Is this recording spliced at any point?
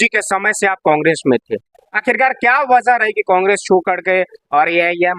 no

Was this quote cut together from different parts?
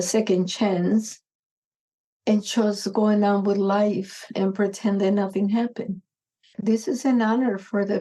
yes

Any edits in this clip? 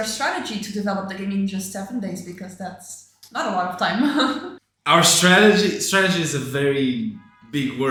no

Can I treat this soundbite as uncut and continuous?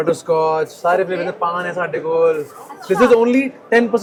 yes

